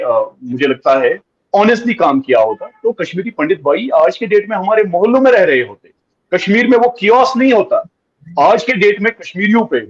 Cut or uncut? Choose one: uncut